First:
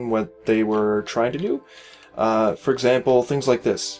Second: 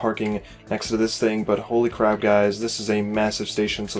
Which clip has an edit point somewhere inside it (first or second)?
second